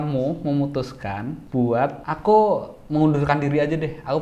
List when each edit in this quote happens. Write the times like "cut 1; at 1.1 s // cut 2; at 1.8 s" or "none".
cut 1; at 1.3 s // cut 2; at 2.1 s